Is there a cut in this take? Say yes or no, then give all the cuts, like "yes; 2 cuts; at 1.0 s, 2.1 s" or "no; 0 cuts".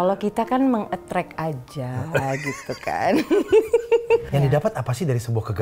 yes; 1 cut; at 4.2 s